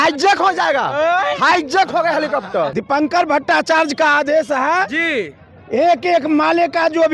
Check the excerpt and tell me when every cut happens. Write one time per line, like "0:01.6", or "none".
0:02.7